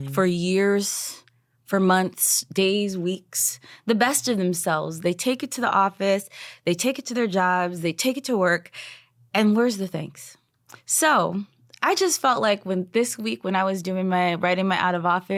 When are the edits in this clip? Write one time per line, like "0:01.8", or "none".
none